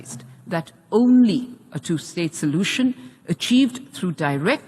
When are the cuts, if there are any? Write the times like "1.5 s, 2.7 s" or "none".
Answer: none